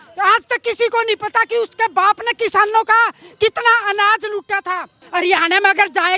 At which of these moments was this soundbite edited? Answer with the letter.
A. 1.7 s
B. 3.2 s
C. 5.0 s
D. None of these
C